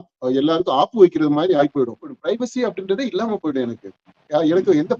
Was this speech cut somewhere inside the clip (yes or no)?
yes